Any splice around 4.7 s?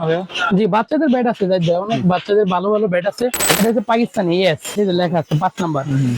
yes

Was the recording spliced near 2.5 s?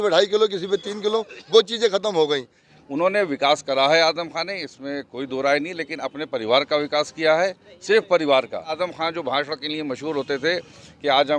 yes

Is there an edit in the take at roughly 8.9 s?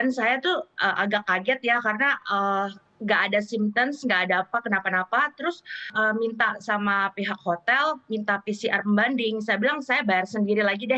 no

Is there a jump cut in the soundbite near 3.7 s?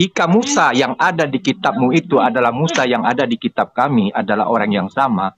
no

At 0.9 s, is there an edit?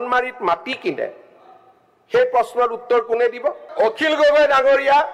no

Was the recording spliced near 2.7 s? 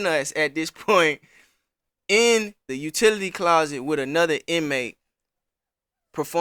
yes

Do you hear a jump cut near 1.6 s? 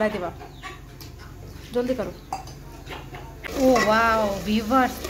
no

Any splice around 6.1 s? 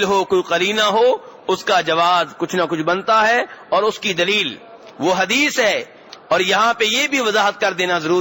yes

